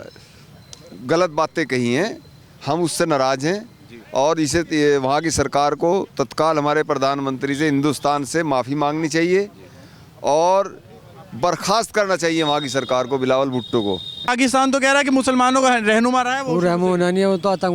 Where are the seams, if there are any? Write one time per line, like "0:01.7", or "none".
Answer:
0:14.3